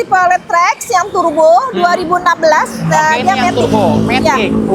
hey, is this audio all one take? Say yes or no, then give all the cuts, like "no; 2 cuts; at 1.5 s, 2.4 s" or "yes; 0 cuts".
yes; 0 cuts